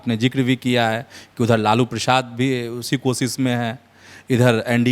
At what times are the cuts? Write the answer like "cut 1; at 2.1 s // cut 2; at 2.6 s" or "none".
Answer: none